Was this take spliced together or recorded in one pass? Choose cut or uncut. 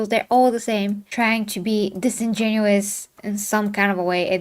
cut